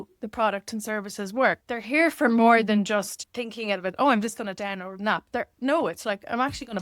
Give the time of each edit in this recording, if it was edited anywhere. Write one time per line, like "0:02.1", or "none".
0:01.6
0:03.2